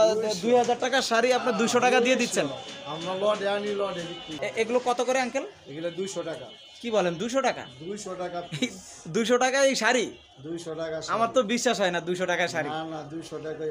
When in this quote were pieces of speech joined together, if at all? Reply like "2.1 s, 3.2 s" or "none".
4.2 s